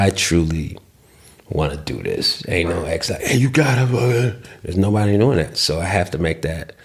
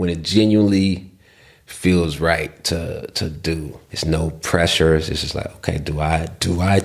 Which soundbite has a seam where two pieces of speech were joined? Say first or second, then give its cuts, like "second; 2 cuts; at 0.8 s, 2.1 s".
second; 1 cut; at 3.8 s